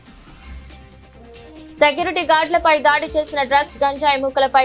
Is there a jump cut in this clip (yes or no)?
yes